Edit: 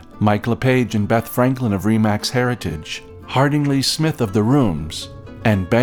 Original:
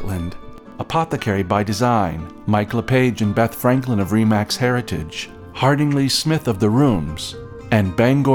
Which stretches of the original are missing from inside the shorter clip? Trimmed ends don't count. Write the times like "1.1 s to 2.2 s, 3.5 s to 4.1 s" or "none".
none